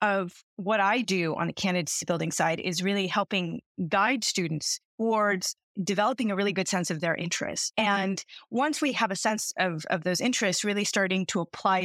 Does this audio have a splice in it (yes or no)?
no